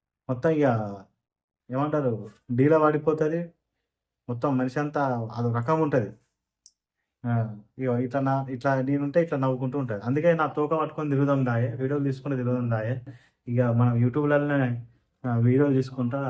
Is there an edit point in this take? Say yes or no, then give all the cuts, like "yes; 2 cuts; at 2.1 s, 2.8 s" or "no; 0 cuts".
no; 0 cuts